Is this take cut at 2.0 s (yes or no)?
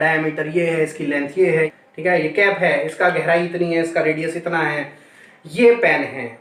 no